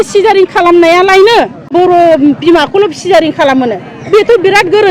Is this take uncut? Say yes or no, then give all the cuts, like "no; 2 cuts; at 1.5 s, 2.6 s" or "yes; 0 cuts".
no; 1 cut; at 1.7 s